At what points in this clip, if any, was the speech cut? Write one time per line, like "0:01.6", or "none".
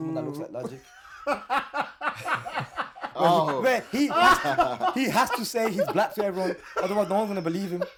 none